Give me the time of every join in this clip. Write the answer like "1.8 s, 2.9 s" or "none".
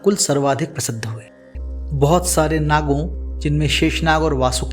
1.5 s